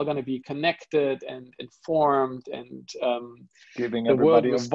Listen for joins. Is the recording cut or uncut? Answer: uncut